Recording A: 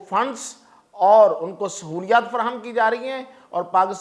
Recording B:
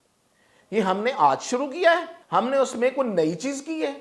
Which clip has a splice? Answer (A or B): B